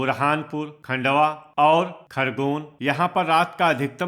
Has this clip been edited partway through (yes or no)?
yes